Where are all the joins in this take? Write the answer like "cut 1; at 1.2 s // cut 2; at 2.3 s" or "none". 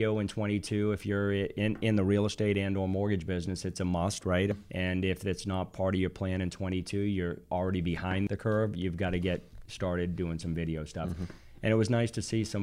cut 1; at 4.5 s // cut 2; at 8.3 s